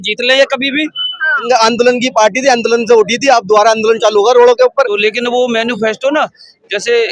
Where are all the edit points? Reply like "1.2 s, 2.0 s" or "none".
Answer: 1.4 s, 4.9 s